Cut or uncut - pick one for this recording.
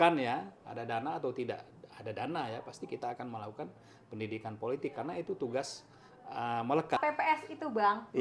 cut